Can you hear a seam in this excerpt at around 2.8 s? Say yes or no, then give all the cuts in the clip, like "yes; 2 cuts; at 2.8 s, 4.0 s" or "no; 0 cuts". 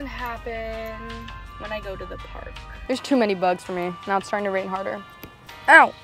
yes; 1 cut; at 2.8 s